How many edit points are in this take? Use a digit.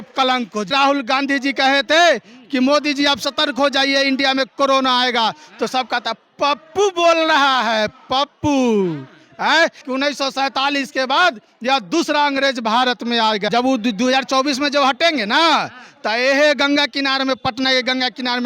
3